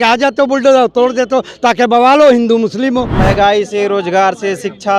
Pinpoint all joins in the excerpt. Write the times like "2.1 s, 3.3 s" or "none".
3.1 s

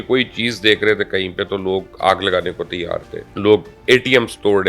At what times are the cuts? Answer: 3.2 s

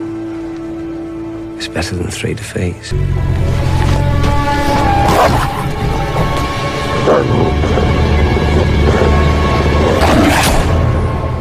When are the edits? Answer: 1.0 s

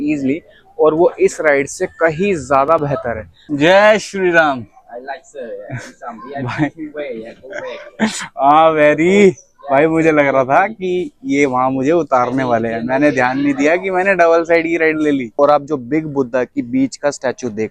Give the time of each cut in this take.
3.4 s, 15.3 s

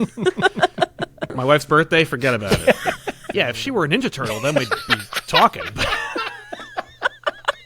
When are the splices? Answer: 1.2 s, 3.3 s

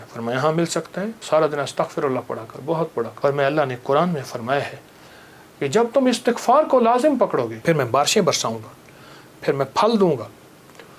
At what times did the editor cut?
1.2 s, 3.1 s, 7.5 s

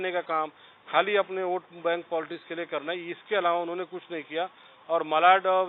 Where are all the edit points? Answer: none

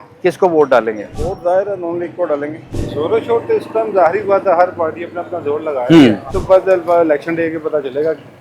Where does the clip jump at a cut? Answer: 1.1 s, 2.7 s, 6.3 s

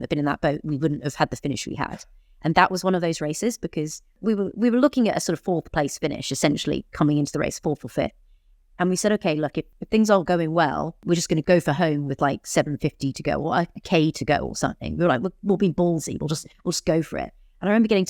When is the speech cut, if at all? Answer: 4.2 s, 9.7 s, 11.3 s

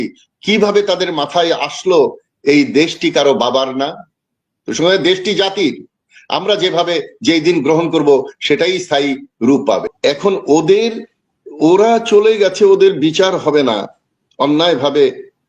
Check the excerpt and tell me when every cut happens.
9.9 s

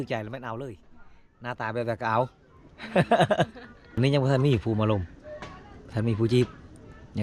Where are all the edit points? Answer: 4.0 s

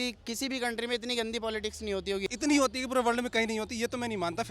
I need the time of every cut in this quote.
2.3 s

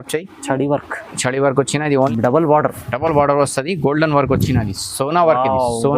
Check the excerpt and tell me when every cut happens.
2.1 s

